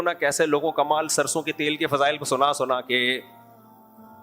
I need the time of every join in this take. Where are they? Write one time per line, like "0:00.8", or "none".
0:03.2